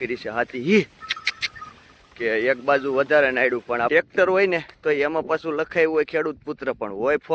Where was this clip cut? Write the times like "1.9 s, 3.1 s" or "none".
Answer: 3.9 s